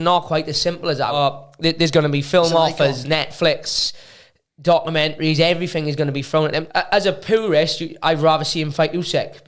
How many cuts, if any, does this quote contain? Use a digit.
2